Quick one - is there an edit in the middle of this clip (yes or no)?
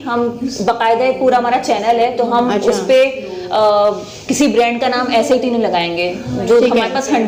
no